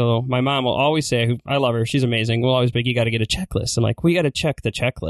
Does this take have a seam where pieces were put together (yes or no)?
no